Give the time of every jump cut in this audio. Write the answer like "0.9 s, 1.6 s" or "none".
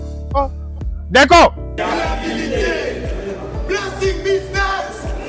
1.8 s